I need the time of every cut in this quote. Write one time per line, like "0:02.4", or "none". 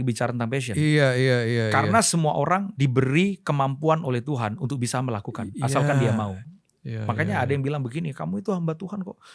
0:06.4